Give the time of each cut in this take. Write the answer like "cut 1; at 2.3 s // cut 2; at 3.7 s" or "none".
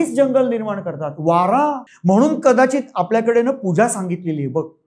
cut 1; at 1.9 s